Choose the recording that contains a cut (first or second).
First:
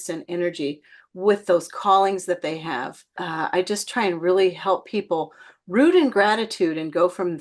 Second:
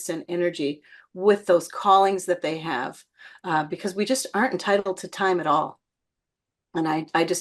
first